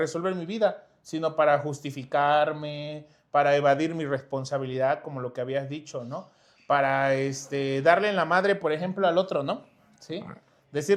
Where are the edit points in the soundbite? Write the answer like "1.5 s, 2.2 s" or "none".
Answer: none